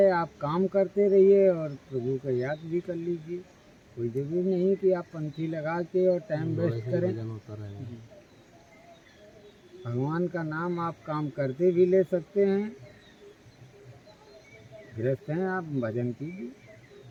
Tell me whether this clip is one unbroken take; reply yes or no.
yes